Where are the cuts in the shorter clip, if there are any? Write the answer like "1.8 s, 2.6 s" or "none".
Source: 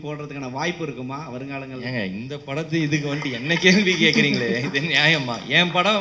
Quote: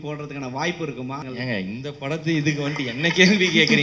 1.2 s